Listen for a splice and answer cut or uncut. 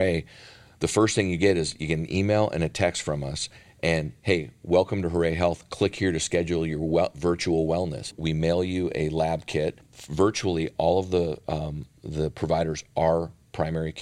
cut